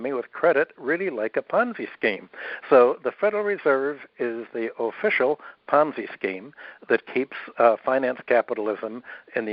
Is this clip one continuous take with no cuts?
yes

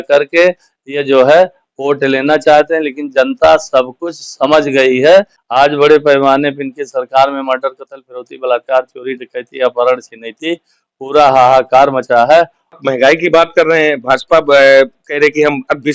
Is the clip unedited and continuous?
no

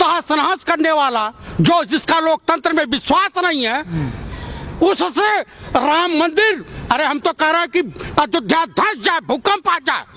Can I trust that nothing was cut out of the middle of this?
yes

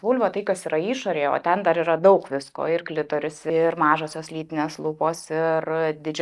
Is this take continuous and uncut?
no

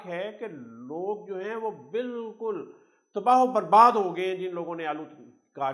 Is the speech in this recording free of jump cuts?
yes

